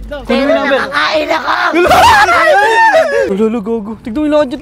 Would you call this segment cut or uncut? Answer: cut